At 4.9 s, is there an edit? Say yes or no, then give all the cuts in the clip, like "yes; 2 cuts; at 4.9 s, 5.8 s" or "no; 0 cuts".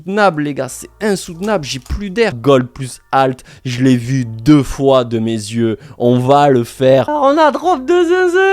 no; 2 cuts; at 2.4 s, 7.1 s